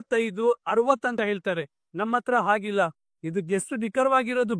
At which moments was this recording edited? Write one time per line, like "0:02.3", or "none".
0:01.1